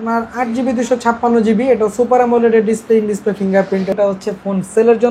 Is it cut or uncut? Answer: cut